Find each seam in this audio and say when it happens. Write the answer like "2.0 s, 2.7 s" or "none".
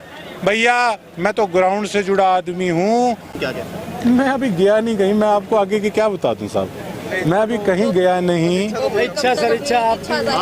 3.4 s